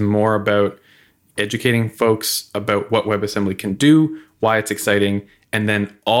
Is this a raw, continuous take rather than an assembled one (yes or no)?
yes